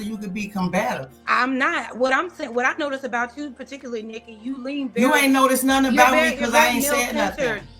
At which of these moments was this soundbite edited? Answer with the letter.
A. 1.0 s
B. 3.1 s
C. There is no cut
B